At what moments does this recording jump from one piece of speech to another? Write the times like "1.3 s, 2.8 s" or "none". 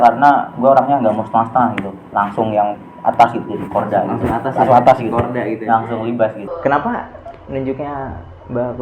6.5 s